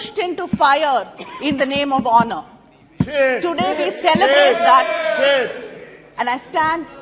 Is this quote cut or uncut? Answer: uncut